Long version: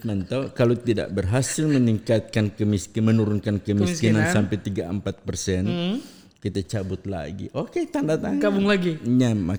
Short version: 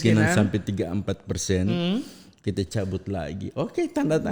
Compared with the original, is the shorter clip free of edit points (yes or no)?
yes